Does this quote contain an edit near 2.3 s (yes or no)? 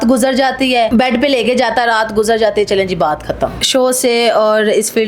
no